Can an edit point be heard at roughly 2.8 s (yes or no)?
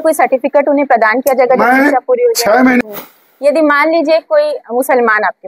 yes